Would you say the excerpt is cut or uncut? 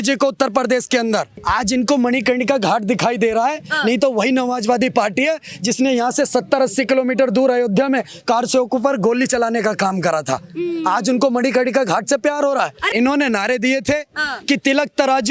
cut